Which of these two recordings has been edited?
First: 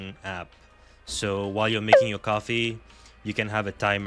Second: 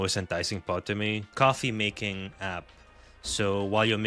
second; 1 cut; at 1.3 s

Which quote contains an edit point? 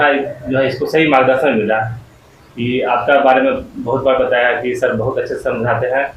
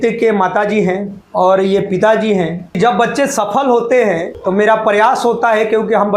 second; 3 cuts; at 1.2 s, 2.8 s, 4.3 s

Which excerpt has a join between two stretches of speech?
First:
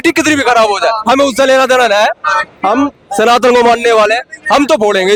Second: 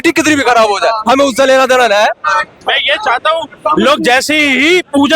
second; 1 cut; at 2.5 s

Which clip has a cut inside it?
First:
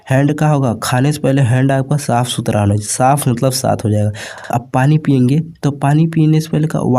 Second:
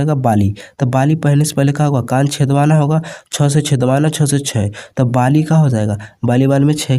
first; 1 cut; at 4.4 s

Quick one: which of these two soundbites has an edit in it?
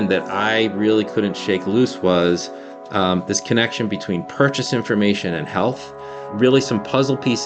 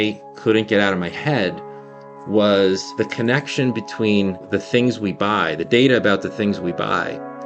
second; 2 cuts; at 2.9 s, 4.5 s

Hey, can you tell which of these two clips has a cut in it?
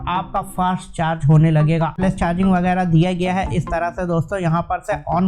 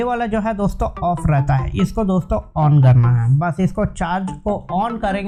first; 1 cut; at 2.0 s

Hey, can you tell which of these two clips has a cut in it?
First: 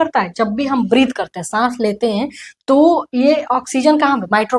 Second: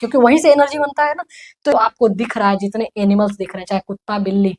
second; 1 cut; at 1.7 s

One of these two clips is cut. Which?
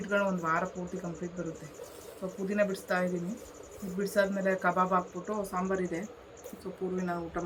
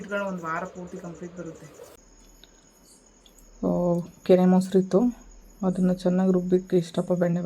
second; 1 cut; at 2.0 s

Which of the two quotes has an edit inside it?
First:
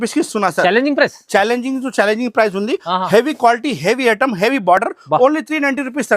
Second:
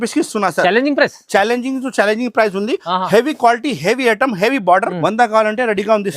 second; 1 cut; at 4.9 s

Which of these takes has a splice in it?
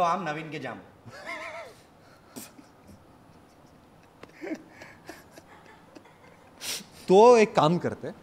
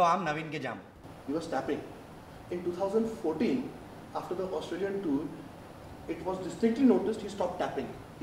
second; 1 cut; at 1.1 s

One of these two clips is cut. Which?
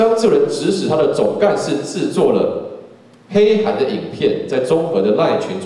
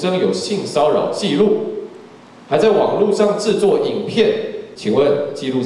second; 1 cut; at 4.6 s

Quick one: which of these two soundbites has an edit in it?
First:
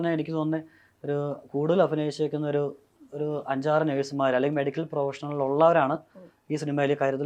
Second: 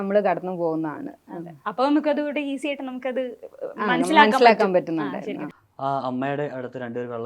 second; 1 cut; at 5.6 s

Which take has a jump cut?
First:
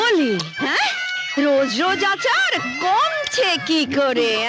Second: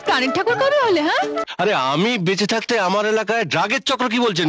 second; 1 cut; at 1.4 s

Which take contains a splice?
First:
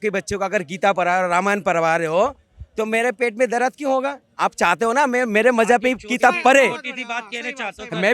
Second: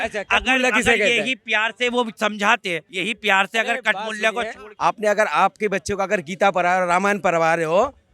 second; 2 cuts; at 2.9 s, 4.6 s

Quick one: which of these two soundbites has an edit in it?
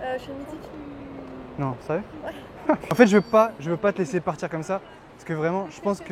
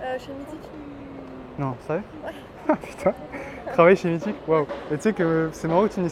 first; 1 cut; at 2.9 s

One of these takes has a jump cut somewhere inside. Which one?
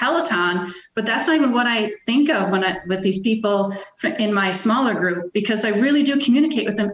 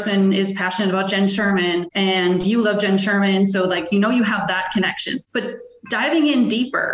second; 2 cuts; at 1.9 s, 5.2 s

